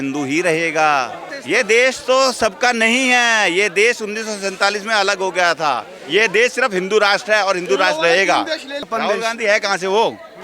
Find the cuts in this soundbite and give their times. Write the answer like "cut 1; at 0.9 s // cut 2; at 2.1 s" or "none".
cut 1; at 1.3 s // cut 2; at 8.8 s